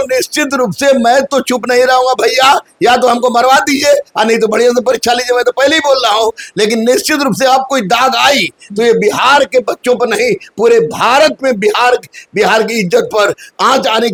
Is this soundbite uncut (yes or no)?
yes